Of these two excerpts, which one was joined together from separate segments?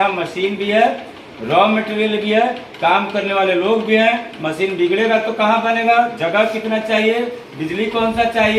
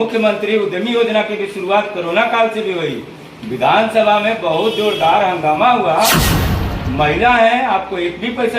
second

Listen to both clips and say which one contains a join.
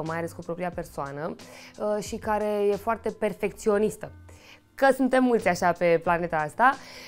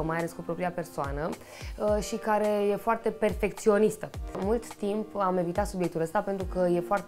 second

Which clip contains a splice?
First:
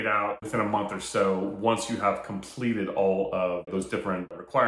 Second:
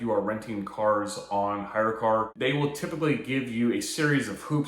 second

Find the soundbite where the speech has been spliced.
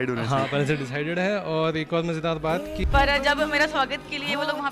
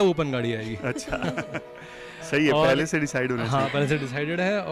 first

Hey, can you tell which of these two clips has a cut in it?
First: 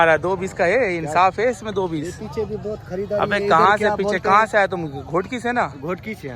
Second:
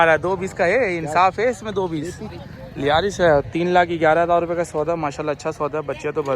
second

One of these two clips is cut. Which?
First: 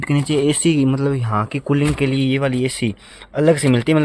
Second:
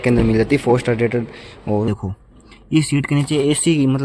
second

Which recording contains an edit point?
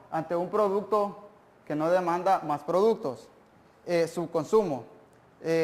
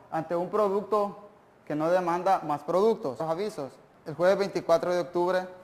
first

